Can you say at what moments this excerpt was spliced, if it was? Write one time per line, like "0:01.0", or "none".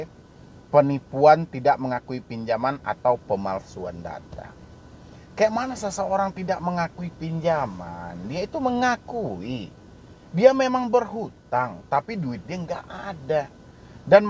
none